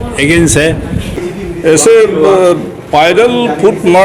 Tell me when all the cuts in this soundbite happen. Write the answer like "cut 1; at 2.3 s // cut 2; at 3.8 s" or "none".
cut 1; at 1.3 s